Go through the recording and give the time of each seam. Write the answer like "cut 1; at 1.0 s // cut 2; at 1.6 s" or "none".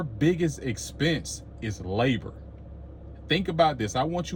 none